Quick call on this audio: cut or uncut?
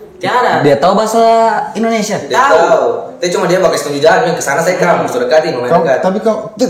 uncut